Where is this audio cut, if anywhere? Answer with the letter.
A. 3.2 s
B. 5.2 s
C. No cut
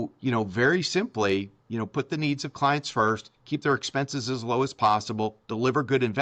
C